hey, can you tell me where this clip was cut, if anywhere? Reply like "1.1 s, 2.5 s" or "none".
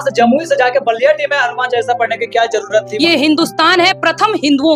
2.9 s